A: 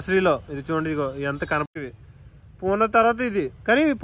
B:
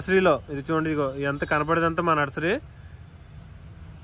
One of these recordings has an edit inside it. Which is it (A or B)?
A